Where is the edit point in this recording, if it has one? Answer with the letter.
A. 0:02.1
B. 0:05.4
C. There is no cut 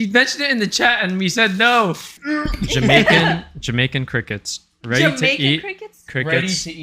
A